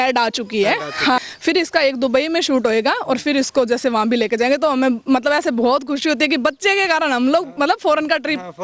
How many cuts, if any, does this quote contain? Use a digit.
1